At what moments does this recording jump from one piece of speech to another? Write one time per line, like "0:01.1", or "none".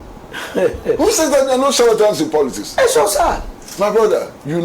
0:03.1